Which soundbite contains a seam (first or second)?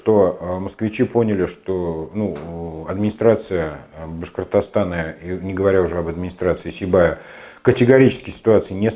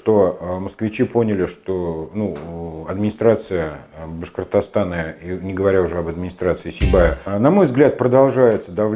second